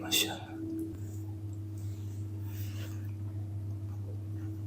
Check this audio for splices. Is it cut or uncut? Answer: cut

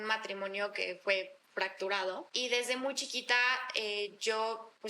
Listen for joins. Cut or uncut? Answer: cut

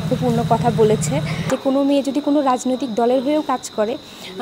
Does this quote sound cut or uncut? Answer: cut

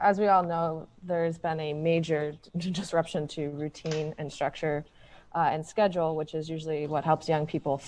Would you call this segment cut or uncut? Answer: uncut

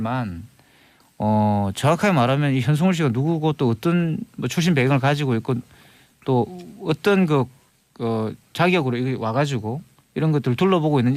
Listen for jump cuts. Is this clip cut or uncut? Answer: uncut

